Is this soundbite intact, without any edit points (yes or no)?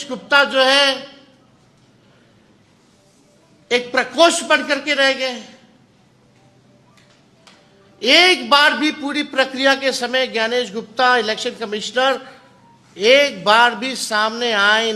yes